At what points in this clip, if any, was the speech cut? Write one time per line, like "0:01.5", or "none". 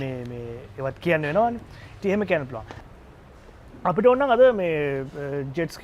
0:02.7